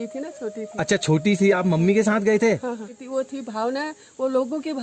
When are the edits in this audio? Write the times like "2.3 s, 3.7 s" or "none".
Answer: 3.0 s

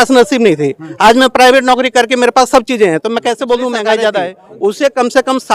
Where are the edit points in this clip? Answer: 4.4 s

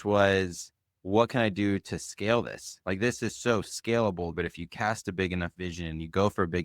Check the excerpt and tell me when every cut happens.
4.3 s

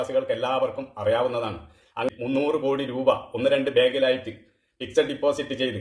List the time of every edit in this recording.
2.1 s

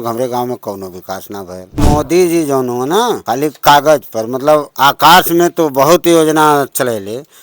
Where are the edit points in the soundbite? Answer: 1.8 s, 3.2 s, 4.7 s

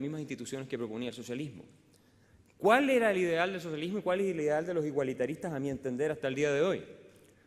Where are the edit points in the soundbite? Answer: 5.9 s

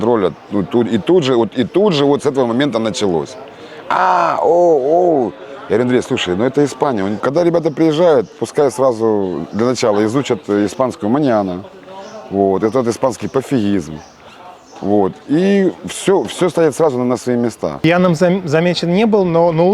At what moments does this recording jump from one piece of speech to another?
7.2 s, 17.8 s

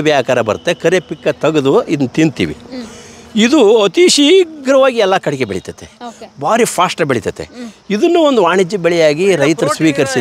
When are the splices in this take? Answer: none

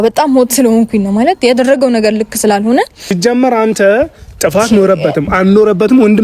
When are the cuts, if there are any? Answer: 3.0 s

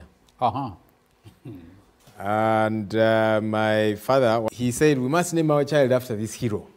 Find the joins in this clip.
4.5 s

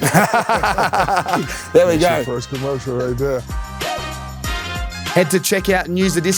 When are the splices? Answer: 3.5 s, 5.1 s

